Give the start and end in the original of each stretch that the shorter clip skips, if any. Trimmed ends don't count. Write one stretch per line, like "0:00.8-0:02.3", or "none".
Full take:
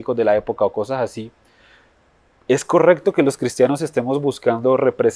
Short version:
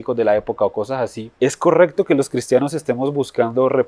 0:01.2-0:02.3